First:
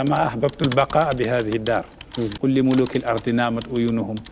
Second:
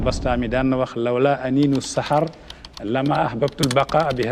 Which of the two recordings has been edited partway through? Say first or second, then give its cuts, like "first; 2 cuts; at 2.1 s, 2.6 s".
first; 1 cut; at 2.3 s